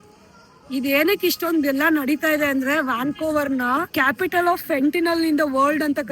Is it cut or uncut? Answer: cut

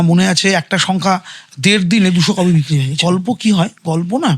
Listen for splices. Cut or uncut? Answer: cut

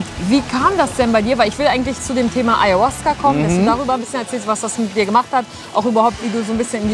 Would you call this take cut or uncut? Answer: uncut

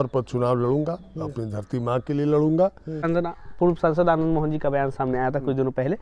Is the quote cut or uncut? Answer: cut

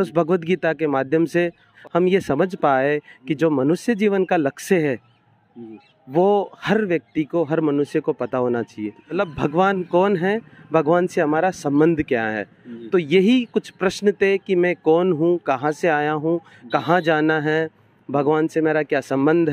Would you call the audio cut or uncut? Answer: cut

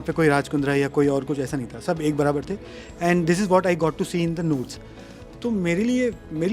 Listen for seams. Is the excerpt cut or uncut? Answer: uncut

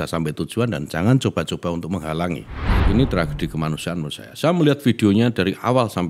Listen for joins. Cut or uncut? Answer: cut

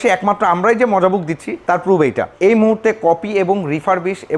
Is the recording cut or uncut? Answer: cut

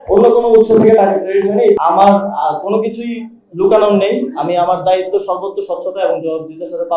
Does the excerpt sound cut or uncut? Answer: cut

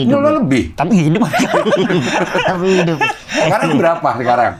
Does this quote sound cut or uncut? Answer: uncut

